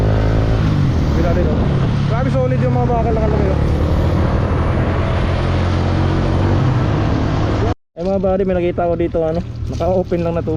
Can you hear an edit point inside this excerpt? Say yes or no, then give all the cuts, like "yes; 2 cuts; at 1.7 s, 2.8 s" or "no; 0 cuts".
no; 0 cuts